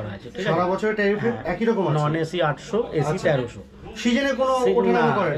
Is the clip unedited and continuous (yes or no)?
yes